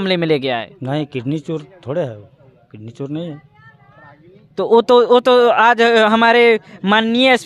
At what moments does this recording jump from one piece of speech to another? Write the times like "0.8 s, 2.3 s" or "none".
none